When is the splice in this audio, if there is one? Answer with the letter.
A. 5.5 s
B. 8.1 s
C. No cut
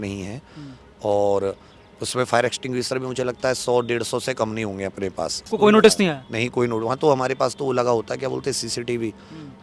A